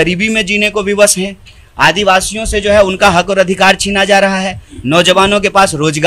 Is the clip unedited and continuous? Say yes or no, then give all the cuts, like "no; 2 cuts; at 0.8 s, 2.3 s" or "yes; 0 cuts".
yes; 0 cuts